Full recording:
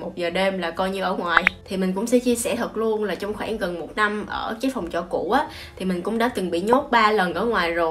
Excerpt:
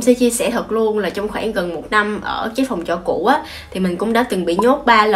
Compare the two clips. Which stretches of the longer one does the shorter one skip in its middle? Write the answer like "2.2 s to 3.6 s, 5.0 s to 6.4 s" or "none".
none